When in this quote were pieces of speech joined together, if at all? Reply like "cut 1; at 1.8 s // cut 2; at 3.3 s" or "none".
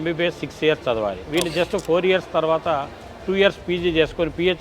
cut 1; at 1.2 s